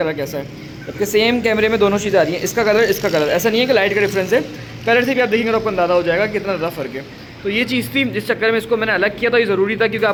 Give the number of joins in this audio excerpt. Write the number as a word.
zero